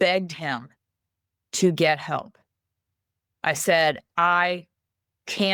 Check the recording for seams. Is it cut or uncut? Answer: uncut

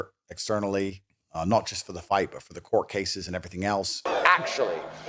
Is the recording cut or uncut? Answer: cut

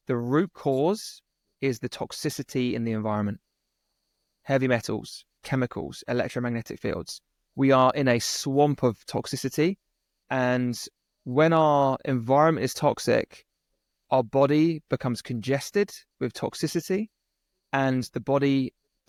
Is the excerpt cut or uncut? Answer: uncut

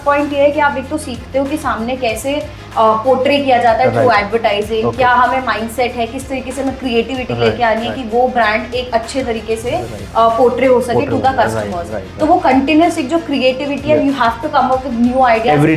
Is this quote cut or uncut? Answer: uncut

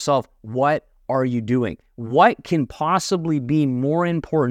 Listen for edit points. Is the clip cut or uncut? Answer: uncut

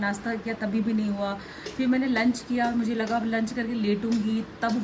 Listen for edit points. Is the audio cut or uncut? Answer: uncut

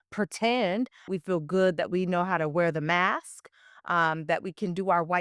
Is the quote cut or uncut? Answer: cut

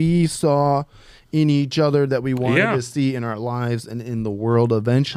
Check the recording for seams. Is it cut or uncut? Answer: uncut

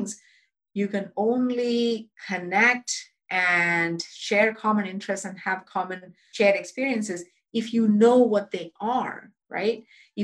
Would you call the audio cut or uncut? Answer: cut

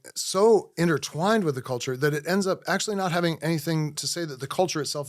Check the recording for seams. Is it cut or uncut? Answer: cut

